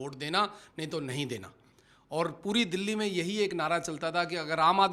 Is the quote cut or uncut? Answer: uncut